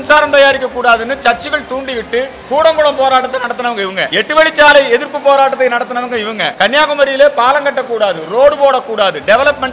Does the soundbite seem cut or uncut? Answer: cut